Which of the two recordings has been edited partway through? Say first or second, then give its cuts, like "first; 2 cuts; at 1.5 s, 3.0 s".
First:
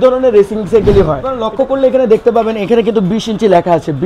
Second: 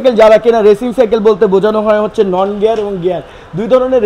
first; 1 cut; at 1.4 s